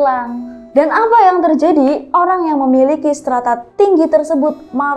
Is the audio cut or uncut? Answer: uncut